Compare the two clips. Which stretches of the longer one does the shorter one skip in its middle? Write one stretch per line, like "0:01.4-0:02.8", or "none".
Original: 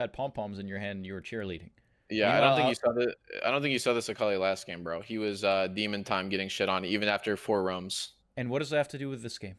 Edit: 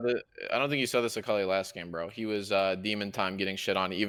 none

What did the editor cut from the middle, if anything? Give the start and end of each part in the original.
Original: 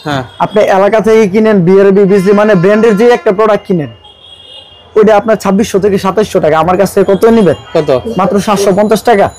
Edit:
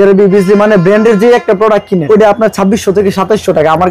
0:03.8-0:04.9

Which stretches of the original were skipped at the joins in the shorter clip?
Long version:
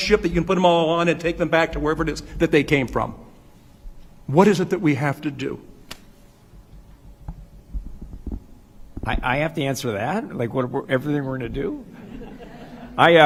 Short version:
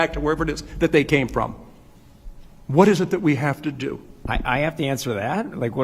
0:05.7-0:08.9

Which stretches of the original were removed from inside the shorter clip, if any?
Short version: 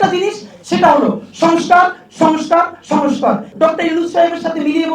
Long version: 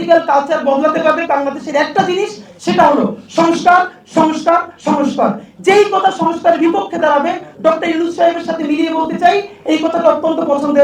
0:05.4-0:07.5

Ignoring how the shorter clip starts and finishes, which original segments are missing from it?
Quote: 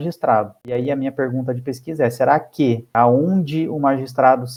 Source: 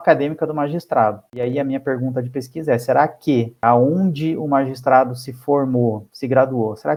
none

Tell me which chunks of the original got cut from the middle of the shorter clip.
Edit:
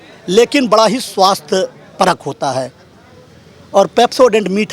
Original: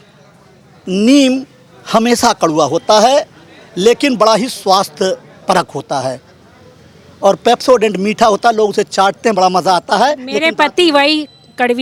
none

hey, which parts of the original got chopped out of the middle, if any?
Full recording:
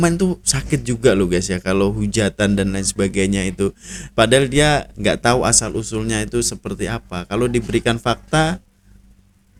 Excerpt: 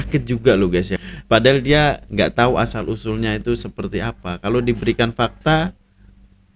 0:01.6-0:03.8

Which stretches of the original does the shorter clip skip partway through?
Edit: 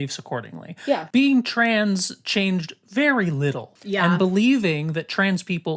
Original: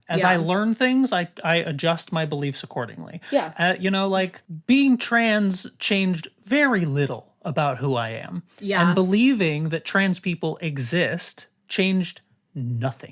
0:03.5-0:04.6
0:07.3-0:08.5

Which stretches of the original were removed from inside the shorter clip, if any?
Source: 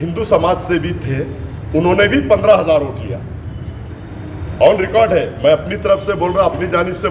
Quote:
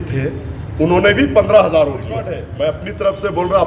0:03.4-0:05.3

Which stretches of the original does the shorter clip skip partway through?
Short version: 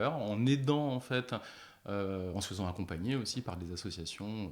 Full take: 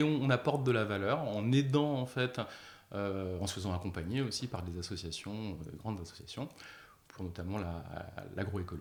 none

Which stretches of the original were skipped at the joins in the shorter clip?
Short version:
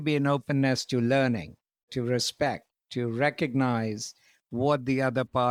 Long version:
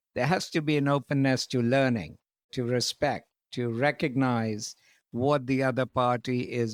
none

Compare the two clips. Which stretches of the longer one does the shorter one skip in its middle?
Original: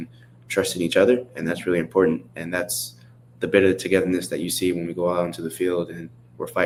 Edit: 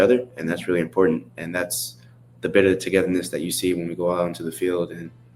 none

